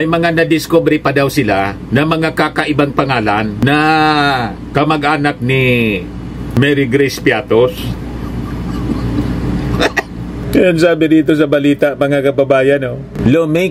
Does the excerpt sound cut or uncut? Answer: uncut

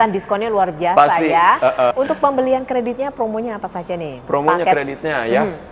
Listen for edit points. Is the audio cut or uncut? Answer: cut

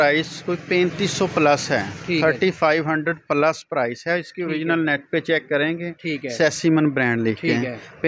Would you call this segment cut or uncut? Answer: uncut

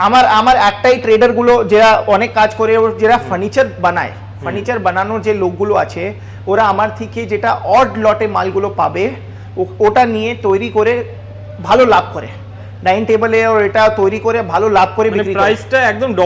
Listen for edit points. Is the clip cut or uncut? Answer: uncut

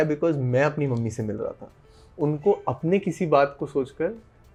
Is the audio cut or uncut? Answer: uncut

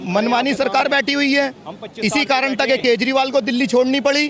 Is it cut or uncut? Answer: uncut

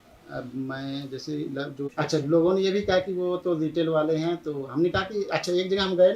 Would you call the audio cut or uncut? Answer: cut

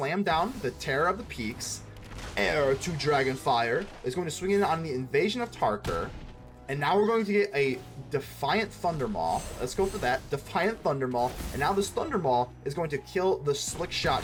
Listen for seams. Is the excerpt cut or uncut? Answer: uncut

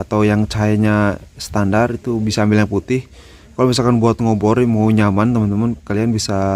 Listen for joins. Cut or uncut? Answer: uncut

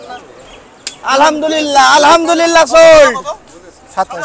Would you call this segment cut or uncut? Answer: uncut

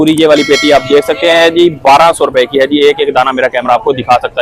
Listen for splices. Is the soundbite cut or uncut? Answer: uncut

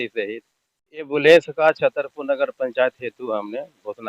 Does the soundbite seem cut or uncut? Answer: cut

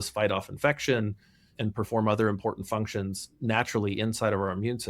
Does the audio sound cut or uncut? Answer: cut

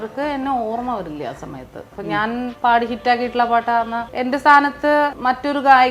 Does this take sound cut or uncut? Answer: cut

